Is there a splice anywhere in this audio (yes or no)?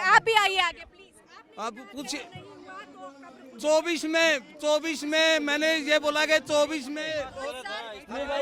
no